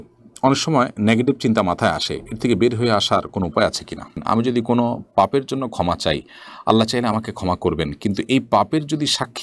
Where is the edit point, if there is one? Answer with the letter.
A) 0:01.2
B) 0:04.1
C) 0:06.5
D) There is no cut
B